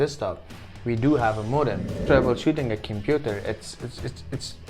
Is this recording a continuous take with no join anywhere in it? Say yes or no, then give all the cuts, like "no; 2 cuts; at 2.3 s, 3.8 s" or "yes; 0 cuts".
no; 1 cut; at 2.0 s